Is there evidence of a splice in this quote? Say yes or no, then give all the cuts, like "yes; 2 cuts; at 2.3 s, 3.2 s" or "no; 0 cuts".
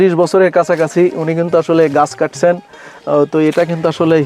no; 0 cuts